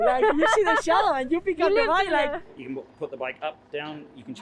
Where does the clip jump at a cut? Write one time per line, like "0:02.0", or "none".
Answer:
0:02.4